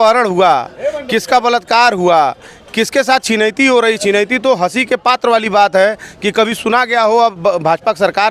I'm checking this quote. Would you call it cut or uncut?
uncut